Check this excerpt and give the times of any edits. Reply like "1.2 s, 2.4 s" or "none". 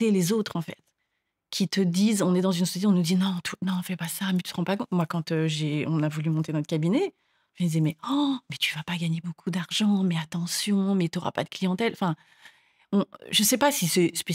none